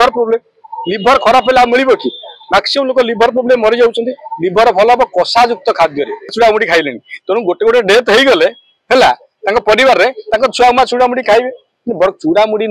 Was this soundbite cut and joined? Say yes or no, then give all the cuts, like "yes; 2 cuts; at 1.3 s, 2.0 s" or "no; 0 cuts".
yes; 1 cut; at 6.3 s